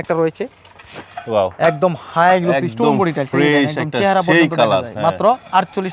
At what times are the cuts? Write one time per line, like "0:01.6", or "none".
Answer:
none